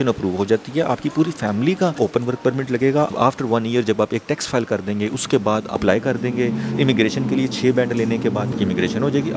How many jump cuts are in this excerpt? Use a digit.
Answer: 4